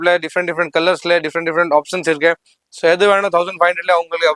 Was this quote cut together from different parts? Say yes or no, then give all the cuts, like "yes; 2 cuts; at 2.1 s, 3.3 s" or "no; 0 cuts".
no; 0 cuts